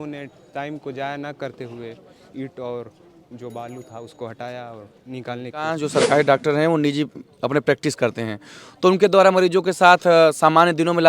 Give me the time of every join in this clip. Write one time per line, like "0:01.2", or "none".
0:05.8